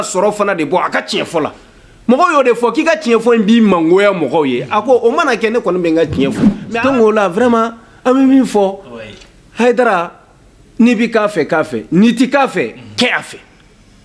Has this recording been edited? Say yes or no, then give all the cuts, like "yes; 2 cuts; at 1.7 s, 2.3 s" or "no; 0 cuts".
yes; 1 cut; at 6.5 s